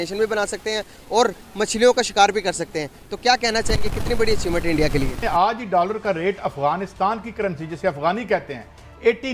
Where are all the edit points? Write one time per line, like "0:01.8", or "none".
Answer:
0:05.2